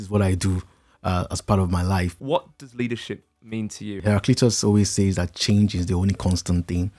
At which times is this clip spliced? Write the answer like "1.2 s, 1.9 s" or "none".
2.2 s, 3.9 s